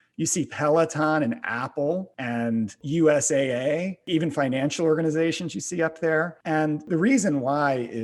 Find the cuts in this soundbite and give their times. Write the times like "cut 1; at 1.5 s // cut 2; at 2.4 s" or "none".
cut 1; at 2.7 s // cut 2; at 4.0 s // cut 3; at 6.8 s